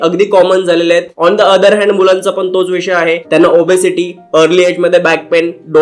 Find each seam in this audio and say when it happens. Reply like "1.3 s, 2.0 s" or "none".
none